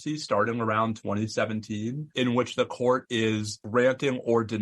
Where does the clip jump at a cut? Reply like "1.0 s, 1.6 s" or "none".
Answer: 2.0 s, 3.5 s